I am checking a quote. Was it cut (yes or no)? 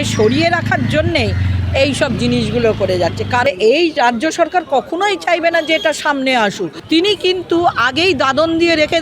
yes